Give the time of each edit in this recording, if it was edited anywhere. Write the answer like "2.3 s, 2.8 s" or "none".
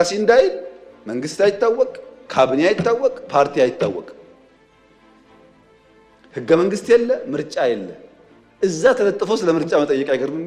4.3 s, 6.3 s